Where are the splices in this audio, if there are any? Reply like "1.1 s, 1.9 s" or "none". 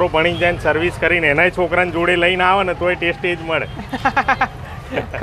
none